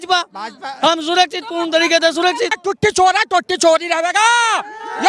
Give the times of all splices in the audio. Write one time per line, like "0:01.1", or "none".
0:02.6